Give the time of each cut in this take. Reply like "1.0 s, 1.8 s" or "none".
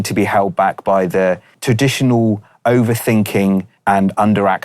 1.5 s, 3.7 s